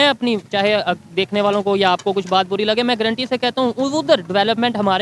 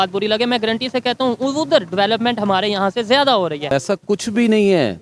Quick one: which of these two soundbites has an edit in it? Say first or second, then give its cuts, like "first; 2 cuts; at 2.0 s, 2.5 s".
second; 1 cut; at 3.7 s